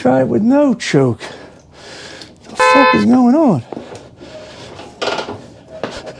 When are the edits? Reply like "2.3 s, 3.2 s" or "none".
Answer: none